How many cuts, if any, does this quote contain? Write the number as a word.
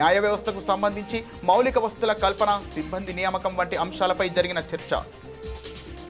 one